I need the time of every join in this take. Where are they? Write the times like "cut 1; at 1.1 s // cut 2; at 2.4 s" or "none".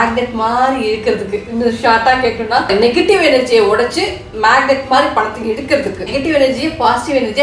cut 1; at 2.7 s // cut 2; at 6.1 s

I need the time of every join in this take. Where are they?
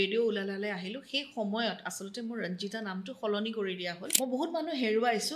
cut 1; at 4.1 s

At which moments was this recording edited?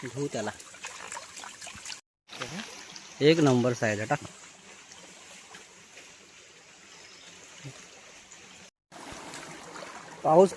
cut 1; at 8.7 s

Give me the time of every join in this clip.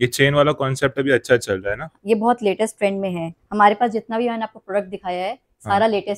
none

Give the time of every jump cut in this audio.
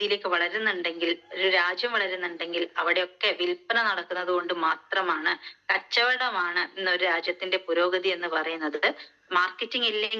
none

